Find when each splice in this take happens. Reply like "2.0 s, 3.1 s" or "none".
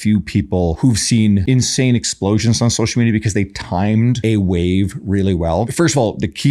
0.8 s, 1.4 s, 4.2 s, 5.7 s

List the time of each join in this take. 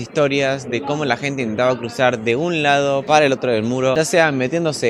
3.0 s, 3.9 s

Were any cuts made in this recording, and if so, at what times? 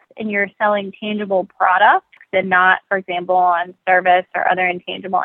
2.2 s

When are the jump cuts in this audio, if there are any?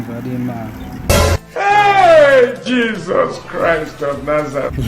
1.1 s

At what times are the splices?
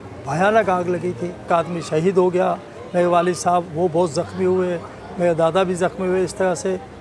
1.5 s

